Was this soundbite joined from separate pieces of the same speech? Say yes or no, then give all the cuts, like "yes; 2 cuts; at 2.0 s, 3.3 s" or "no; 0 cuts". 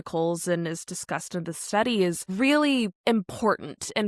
yes; 2 cuts; at 2.2 s, 3.0 s